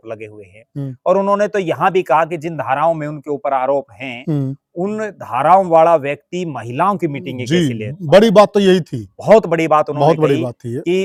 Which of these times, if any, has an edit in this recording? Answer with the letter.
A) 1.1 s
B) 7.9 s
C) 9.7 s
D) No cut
D